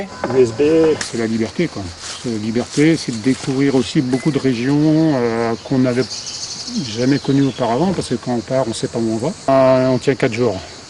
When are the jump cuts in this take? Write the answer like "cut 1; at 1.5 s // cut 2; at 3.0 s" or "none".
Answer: cut 1; at 1.1 s // cut 2; at 9.5 s